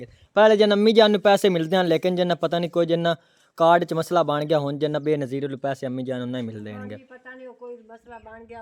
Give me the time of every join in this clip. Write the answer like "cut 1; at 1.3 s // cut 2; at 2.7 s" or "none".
none